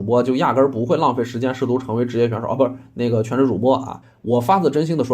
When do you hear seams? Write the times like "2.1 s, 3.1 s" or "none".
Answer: 4.0 s